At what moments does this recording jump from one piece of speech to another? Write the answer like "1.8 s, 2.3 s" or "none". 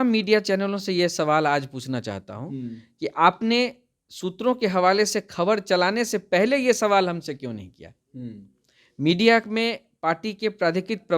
none